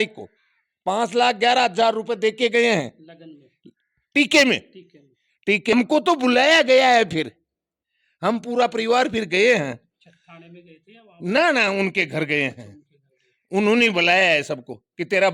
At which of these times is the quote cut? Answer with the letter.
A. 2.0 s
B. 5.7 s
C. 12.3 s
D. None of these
B